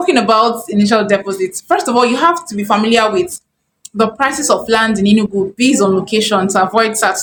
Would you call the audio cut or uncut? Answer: uncut